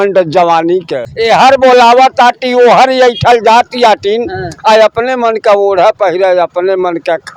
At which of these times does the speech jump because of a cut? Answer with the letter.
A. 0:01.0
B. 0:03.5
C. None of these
A